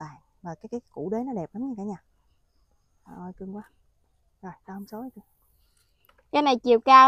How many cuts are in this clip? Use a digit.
0